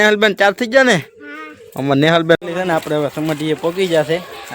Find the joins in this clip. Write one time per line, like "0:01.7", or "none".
0:02.4